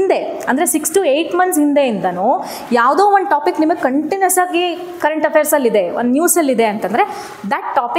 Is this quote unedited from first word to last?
yes; 0 cuts

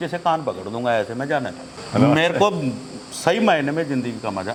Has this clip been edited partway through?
no; 0 cuts

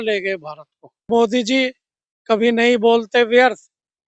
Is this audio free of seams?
no; 1 cut; at 1.1 s

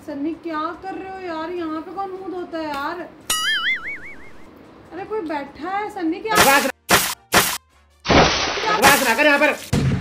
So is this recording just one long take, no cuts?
yes; 0 cuts

